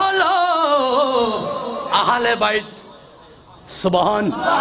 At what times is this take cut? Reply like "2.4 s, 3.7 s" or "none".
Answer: none